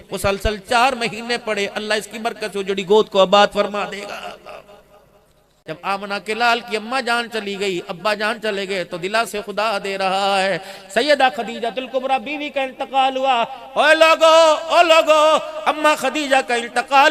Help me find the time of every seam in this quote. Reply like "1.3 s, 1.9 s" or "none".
5.6 s